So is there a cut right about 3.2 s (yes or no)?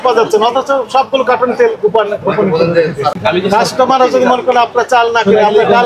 yes